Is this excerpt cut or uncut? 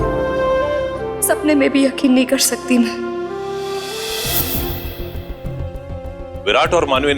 cut